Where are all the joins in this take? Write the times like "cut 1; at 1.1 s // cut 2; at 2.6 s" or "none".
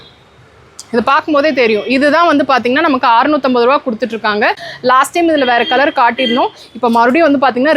cut 1; at 4.7 s